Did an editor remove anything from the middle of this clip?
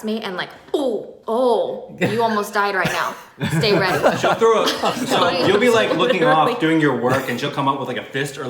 yes; 1 cut; at 1.1 s

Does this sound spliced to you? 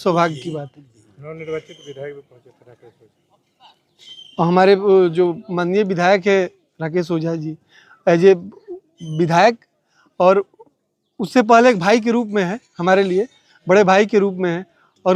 no; 0 cuts

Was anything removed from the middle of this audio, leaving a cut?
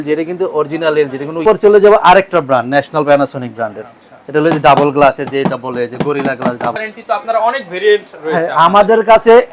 yes; 2 cuts; at 1.4 s, 6.8 s

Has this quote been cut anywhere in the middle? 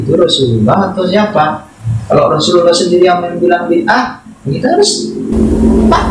no; 0 cuts

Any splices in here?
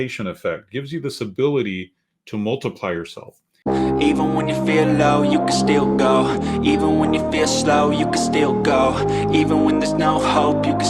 yes; 1 cut; at 3.5 s

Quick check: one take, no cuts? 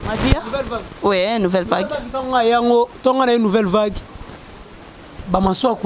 yes; 0 cuts

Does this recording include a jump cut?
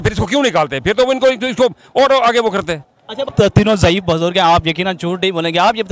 yes; 1 cut; at 3.3 s

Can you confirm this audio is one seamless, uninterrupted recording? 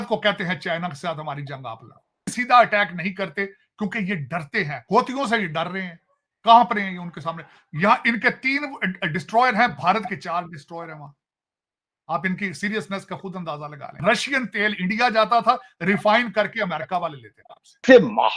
yes; 0 cuts

